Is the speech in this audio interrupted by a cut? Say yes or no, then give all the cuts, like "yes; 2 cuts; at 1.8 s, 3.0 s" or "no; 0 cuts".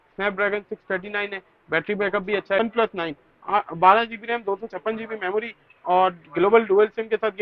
yes; 1 cut; at 2.6 s